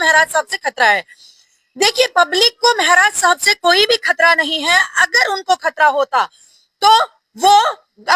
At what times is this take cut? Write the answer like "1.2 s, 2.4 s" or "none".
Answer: none